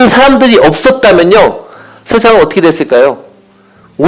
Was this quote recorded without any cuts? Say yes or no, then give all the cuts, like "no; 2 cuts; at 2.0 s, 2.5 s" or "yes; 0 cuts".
yes; 0 cuts